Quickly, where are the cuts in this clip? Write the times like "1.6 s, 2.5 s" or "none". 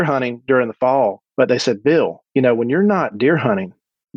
1.2 s, 2.2 s